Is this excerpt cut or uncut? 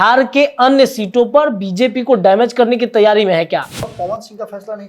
cut